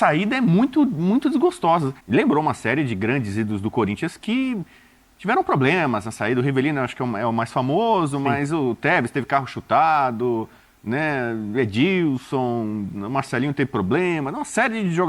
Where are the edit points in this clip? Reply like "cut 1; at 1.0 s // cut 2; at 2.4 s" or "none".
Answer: cut 1; at 1.9 s